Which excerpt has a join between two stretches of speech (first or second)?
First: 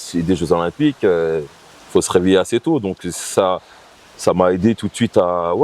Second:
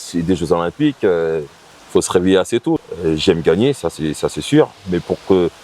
second